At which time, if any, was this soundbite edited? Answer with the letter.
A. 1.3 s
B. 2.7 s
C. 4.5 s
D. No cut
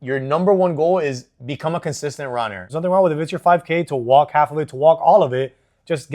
B